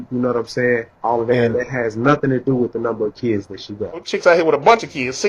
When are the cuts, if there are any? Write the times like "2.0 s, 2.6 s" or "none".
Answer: 0.9 s, 4.1 s